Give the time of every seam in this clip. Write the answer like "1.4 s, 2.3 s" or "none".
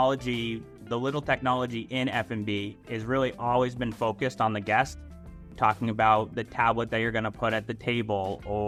none